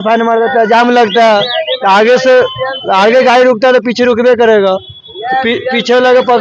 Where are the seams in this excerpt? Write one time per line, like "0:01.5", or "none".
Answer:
none

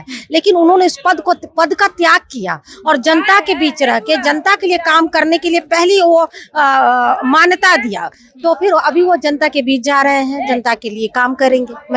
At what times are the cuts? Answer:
none

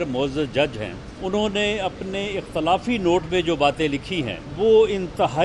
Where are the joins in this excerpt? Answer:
0:01.1
0:04.4

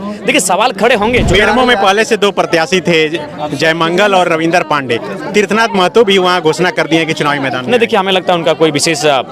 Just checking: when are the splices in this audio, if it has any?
0:01.3

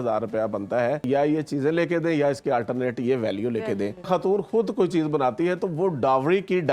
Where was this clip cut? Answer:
0:01.0
0:04.1

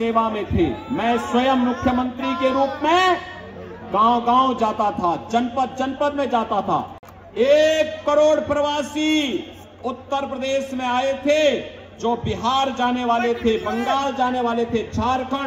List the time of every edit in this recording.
none

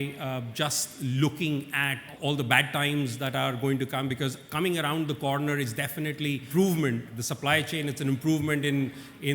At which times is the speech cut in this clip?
0:02.1
0:06.5
0:07.2

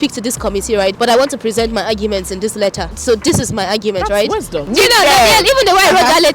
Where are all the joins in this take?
0:04.7

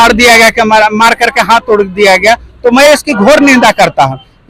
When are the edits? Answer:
none

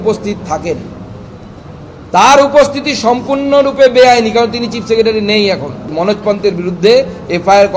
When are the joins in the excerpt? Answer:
0:05.9

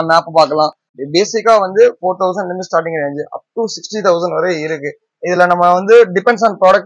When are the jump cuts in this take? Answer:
0:00.9

